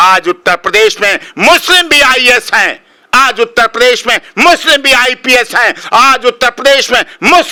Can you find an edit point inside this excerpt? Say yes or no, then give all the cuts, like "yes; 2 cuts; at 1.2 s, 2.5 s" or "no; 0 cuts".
no; 0 cuts